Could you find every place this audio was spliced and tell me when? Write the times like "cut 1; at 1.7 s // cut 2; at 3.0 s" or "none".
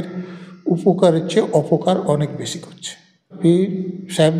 none